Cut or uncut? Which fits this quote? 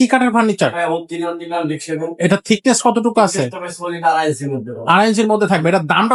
uncut